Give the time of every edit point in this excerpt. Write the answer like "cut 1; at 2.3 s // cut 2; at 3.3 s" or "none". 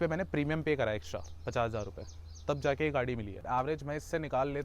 cut 1; at 3.4 s